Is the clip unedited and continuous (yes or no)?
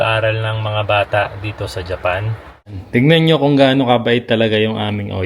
no